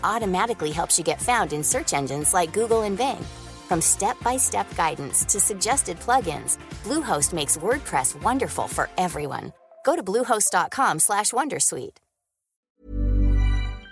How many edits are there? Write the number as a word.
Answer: one